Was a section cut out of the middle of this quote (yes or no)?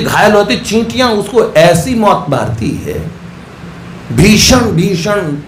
no